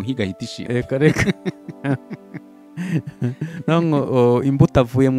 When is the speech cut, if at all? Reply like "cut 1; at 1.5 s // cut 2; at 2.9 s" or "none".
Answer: none